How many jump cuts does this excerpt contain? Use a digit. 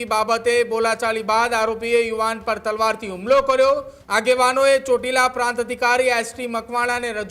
1